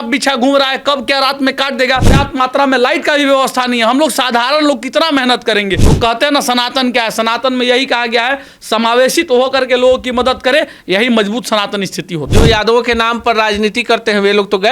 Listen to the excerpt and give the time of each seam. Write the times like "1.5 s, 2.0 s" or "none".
2.1 s, 5.9 s, 12.2 s